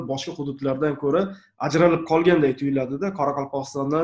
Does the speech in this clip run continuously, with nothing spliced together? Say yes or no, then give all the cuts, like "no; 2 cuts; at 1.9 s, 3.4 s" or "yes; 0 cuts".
yes; 0 cuts